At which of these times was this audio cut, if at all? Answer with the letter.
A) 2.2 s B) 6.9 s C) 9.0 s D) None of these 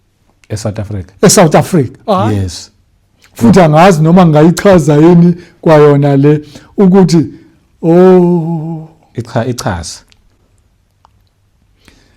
A